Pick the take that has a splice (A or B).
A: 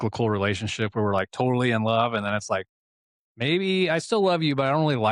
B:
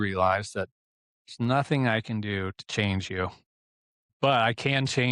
B